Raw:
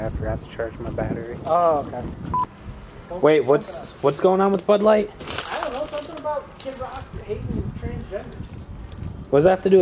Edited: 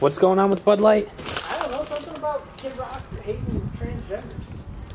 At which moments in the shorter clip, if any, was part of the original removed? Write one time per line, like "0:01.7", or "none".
none